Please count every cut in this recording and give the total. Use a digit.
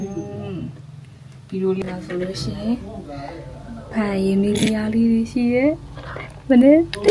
1